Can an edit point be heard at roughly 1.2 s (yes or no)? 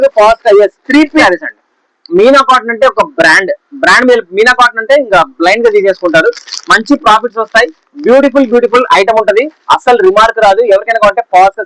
yes